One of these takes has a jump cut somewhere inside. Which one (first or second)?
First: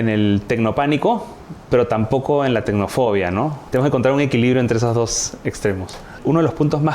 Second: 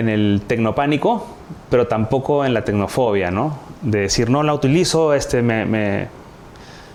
first